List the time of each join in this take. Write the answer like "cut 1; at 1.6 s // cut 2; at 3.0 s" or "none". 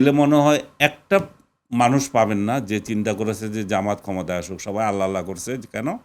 none